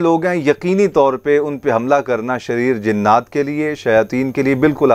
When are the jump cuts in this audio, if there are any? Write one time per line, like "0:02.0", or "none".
none